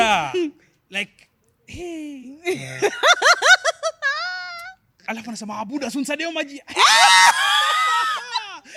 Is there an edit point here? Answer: no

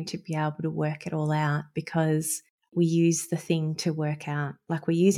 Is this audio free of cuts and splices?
no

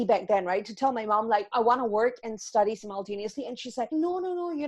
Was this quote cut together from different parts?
yes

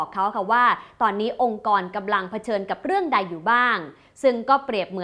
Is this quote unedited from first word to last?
yes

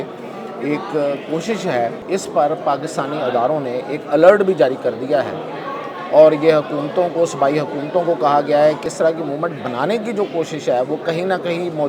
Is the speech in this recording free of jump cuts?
no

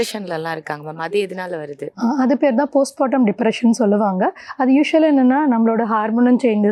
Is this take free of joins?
yes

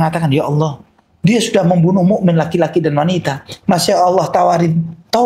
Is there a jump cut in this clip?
no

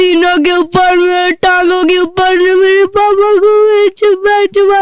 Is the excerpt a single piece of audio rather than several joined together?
yes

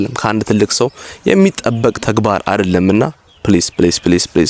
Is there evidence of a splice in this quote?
no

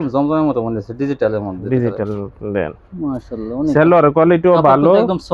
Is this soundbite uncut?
yes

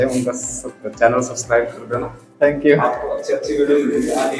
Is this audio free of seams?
yes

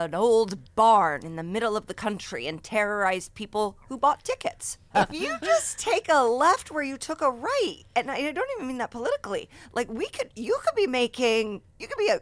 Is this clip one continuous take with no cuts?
no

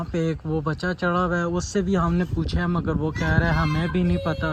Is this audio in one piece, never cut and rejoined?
yes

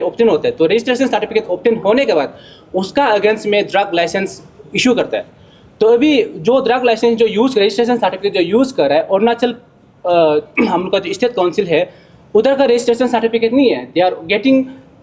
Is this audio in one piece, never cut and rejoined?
yes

